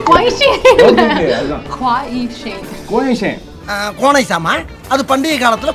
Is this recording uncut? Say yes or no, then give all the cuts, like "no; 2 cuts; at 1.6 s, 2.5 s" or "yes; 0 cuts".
yes; 0 cuts